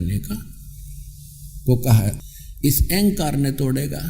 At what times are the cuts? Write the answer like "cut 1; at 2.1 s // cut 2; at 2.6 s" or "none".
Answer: cut 1; at 2.2 s